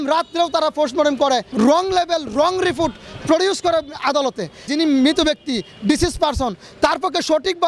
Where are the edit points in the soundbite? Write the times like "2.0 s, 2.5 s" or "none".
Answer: 1.5 s, 4.6 s

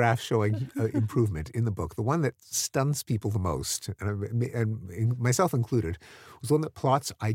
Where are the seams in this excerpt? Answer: none

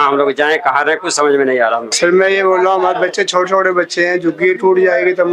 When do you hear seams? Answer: 1.9 s

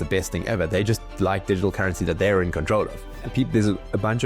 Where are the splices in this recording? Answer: 3.1 s

